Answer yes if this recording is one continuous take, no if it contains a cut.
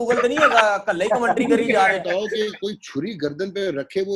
no